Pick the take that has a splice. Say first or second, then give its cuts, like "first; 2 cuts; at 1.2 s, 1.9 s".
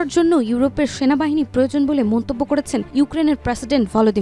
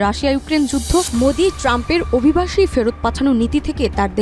second; 1 cut; at 1.1 s